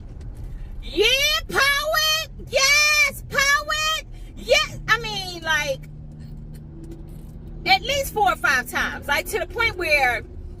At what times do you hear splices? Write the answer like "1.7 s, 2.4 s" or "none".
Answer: none